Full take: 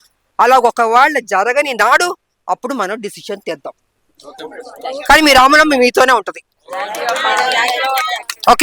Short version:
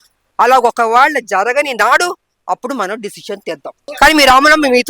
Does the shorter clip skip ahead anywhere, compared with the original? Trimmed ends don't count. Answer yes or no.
yes